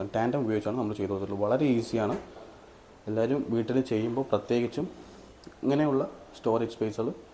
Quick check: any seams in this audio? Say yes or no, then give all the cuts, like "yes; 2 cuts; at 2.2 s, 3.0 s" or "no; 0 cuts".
no; 0 cuts